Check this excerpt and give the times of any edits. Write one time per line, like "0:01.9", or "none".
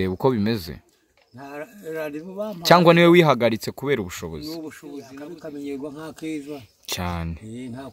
0:05.2